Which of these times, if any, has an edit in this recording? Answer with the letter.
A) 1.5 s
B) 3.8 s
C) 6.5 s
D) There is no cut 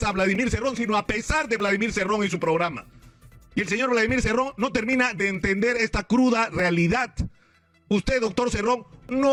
D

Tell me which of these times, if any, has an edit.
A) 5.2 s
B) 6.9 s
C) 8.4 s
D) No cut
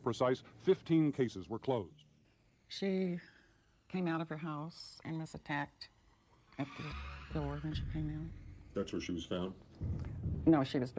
C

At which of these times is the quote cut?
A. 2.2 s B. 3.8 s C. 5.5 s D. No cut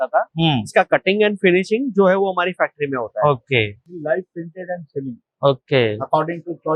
B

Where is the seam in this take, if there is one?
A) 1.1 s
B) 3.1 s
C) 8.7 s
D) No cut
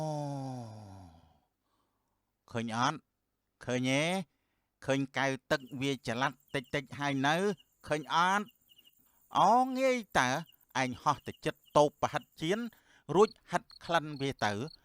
C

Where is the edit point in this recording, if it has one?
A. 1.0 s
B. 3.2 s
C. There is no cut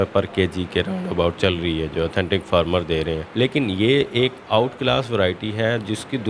B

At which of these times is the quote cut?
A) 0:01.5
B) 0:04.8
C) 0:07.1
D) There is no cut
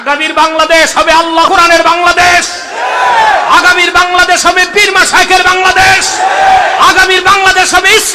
A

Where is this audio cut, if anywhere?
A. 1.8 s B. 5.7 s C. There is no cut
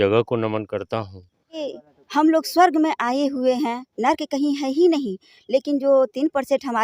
A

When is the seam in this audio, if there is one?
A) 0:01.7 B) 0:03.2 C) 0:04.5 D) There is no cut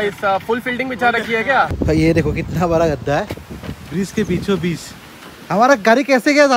A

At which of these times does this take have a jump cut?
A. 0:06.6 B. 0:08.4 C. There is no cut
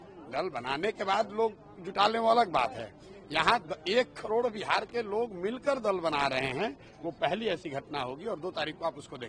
C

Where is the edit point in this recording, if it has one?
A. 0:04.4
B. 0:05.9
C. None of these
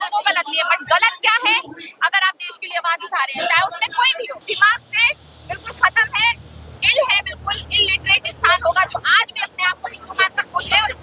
C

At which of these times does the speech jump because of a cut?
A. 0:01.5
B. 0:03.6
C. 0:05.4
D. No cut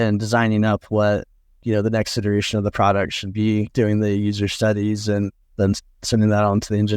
C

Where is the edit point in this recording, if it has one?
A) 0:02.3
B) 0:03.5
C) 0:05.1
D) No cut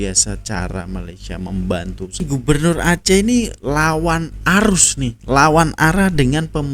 A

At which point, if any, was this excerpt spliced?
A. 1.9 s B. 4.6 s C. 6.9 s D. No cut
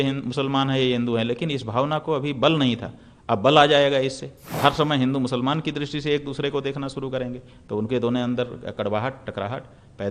B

